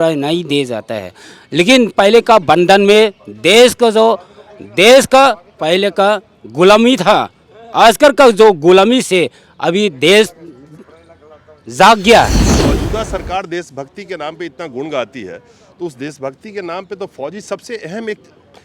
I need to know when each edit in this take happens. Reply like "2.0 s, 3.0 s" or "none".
12.5 s